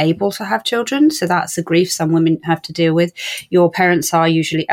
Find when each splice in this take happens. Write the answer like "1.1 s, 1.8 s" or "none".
1.6 s